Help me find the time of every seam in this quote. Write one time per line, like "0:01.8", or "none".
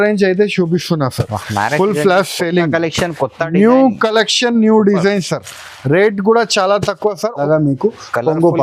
0:07.4